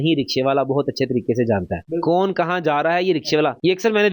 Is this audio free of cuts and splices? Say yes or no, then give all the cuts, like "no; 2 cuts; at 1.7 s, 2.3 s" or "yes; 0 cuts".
yes; 0 cuts